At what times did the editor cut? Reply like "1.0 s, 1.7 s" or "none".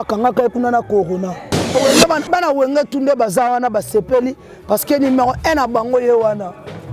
1.7 s